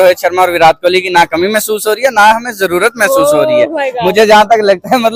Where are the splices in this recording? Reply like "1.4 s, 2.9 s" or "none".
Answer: none

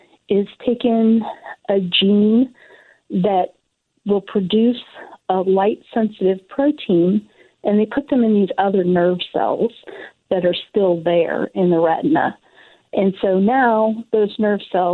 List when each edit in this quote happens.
none

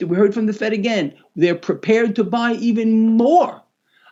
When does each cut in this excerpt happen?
none

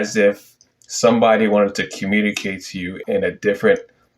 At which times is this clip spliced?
3.0 s

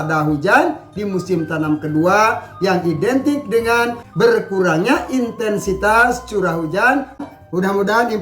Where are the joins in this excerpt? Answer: 7.3 s

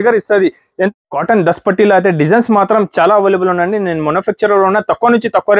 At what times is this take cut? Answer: 0.9 s

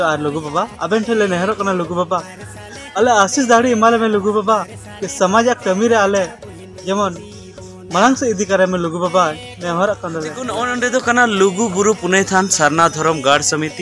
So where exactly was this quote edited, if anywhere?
none

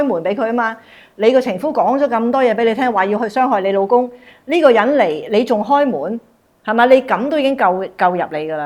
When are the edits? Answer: none

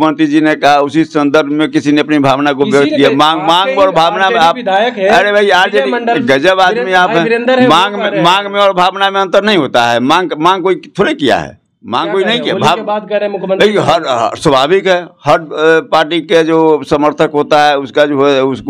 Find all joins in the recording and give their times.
none

